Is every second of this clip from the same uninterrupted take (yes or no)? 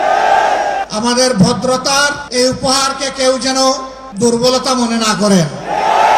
no